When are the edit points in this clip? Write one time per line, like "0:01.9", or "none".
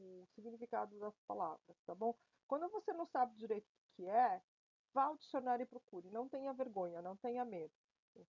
none